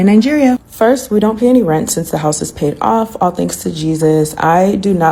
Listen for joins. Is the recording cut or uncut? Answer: uncut